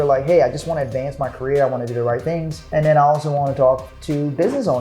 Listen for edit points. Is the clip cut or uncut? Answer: cut